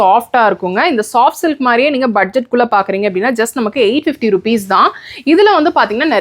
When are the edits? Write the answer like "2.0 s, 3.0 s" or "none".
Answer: none